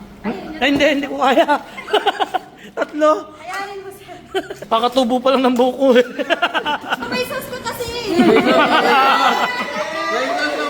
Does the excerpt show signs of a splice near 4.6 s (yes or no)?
yes